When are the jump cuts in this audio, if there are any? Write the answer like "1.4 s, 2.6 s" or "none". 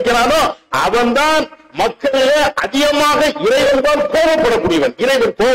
none